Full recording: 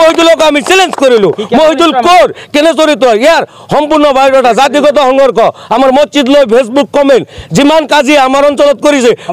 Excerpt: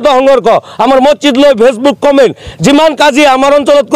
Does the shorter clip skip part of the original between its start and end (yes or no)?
no